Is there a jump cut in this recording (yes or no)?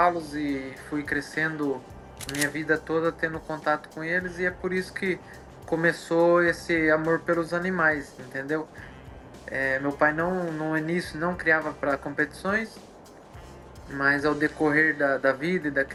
no